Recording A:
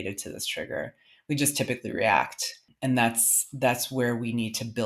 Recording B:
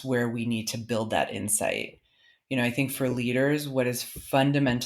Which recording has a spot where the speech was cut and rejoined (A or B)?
A